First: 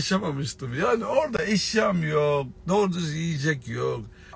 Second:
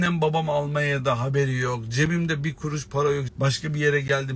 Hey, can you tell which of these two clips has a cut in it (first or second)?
second